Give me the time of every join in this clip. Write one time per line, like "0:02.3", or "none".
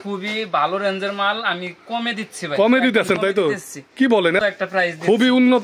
0:04.4